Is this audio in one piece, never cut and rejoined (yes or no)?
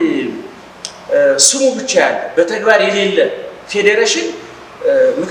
yes